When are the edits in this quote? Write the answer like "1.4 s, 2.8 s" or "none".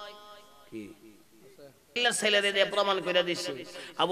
2.0 s